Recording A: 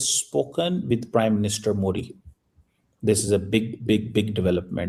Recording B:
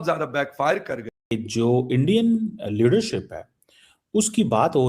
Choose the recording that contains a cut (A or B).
B